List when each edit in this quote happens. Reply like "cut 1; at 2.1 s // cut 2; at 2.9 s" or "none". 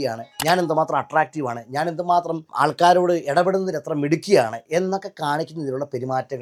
none

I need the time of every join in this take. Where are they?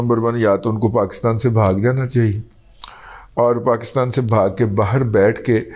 none

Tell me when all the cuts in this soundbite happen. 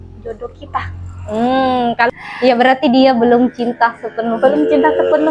cut 1; at 2.1 s

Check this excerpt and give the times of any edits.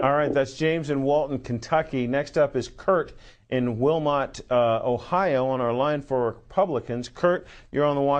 cut 1; at 5.9 s

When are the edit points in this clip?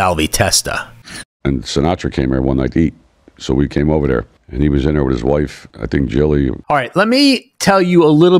cut 1; at 1.3 s // cut 2; at 6.6 s

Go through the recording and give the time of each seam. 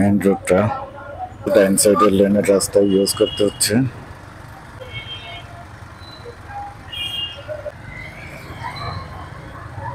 cut 1; at 1.5 s // cut 2; at 4.8 s // cut 3; at 7.7 s

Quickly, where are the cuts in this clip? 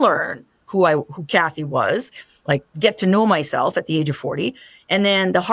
cut 1; at 2.7 s

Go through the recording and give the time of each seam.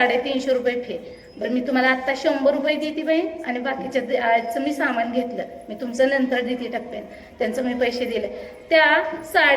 none

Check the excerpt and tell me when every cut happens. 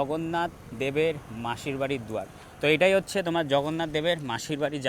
none

